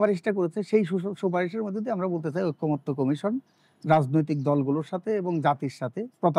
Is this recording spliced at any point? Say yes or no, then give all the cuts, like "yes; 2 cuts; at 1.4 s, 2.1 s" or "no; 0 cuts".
no; 0 cuts